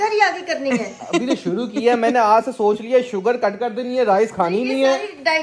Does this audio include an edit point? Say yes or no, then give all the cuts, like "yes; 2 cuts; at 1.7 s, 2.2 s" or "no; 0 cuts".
no; 0 cuts